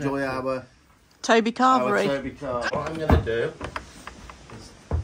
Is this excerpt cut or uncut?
cut